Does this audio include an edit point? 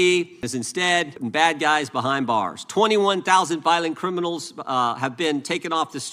yes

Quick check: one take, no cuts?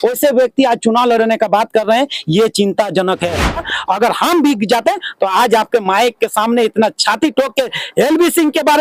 no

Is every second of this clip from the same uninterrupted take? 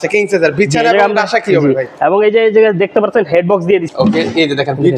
no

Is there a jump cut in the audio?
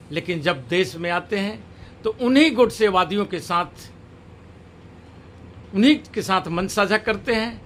no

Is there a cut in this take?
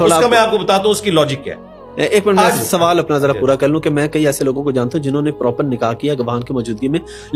no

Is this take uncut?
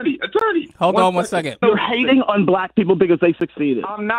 no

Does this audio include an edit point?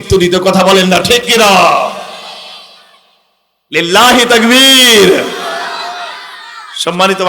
no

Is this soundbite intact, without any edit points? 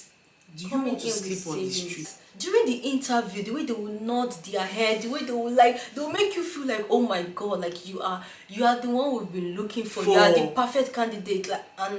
no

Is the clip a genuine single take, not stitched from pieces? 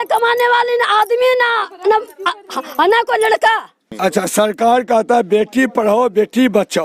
no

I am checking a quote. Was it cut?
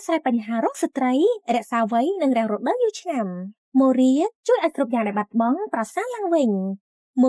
no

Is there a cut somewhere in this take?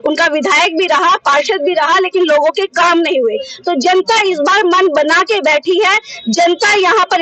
no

